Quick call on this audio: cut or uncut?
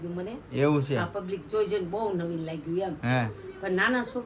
uncut